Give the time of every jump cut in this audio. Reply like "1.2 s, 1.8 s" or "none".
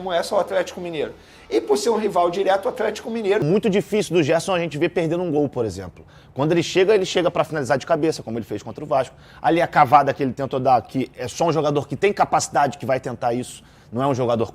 3.4 s